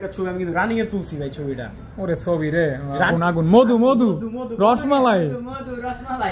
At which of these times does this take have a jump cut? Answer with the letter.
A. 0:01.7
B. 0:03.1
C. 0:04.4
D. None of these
B